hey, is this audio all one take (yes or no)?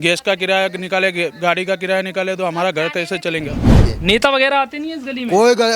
no